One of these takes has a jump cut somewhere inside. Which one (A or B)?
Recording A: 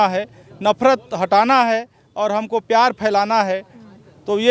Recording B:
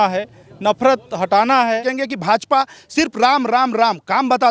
B